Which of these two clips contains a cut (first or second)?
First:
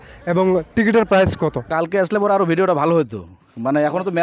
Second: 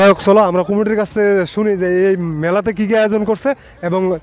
first